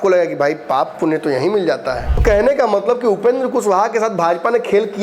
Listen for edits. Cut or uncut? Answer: cut